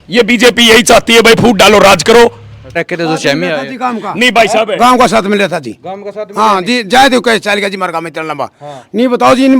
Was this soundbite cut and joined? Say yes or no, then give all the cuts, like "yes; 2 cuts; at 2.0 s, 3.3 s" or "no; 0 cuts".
yes; 1 cut; at 2.7 s